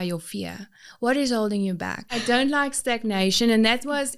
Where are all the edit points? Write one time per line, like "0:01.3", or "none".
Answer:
0:02.1